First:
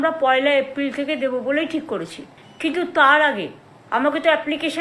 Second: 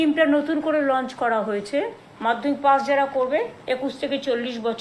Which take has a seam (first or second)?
second